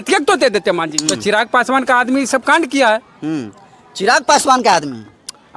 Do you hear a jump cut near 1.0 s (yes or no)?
yes